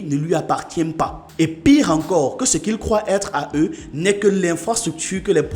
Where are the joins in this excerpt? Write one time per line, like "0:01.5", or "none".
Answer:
none